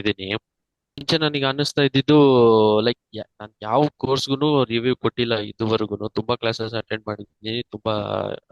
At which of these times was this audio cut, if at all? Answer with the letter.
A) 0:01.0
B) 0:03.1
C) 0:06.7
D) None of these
A